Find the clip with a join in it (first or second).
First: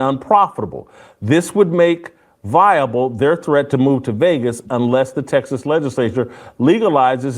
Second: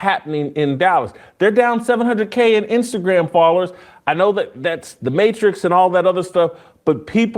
first